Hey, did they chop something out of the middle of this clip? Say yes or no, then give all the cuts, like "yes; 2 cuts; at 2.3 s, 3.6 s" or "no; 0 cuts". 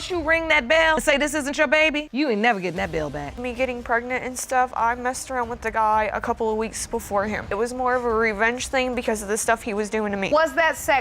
yes; 1 cut; at 3.4 s